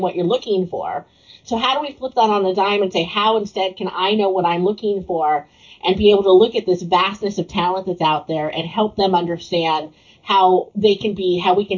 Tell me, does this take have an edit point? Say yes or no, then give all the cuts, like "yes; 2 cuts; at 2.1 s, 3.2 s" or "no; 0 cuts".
yes; 1 cut; at 10.7 s